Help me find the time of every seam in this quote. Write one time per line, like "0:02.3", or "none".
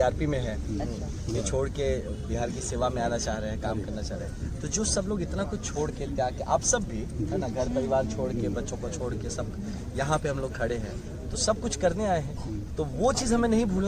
none